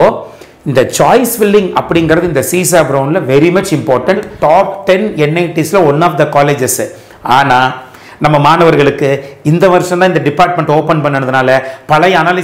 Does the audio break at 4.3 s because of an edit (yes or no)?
yes